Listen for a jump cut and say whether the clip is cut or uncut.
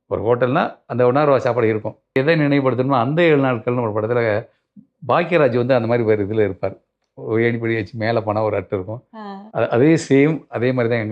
cut